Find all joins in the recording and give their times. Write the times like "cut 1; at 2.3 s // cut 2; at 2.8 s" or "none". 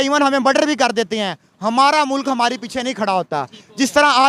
none